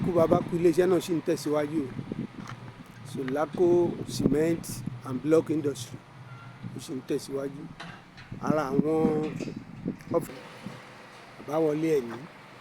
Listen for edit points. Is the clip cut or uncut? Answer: cut